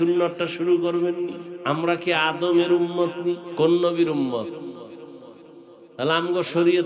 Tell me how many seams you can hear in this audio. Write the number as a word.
two